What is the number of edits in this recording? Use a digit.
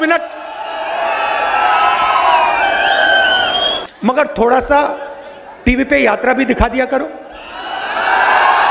1